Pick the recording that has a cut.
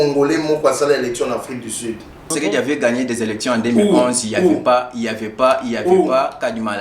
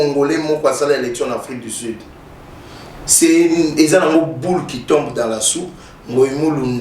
first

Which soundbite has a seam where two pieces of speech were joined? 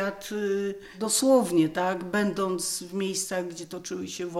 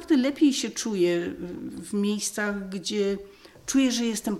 first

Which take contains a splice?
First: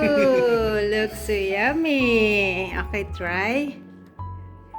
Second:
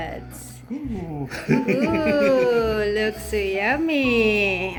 first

